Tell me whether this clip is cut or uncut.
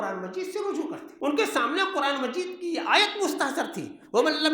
cut